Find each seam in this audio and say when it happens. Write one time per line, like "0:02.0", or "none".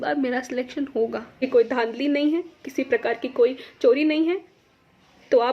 0:01.4